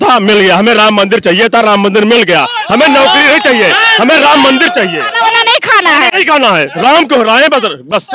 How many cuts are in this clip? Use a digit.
1